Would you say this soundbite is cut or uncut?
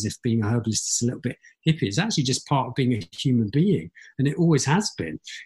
uncut